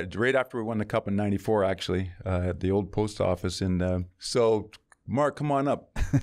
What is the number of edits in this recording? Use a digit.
1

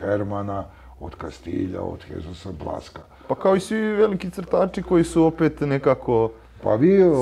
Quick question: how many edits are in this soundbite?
0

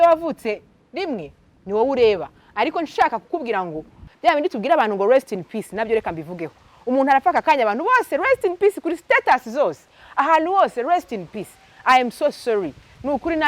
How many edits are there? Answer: 1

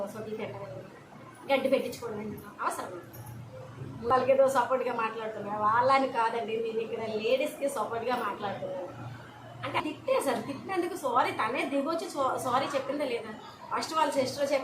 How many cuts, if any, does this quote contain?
2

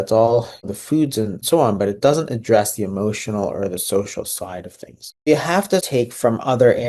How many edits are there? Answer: 2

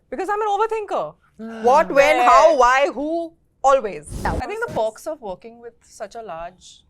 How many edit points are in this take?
1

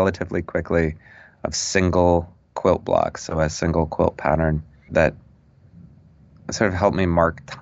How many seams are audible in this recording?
0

